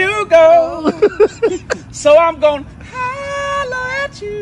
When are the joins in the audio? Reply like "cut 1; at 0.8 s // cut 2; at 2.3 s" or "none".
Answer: cut 1; at 1.4 s